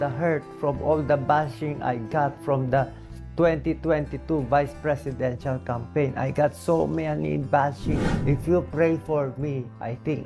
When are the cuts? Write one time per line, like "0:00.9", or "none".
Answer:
0:08.1